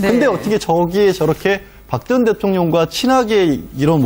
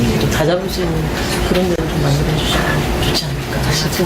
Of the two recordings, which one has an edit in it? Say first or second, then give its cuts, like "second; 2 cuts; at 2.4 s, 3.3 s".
second; 1 cut; at 2.7 s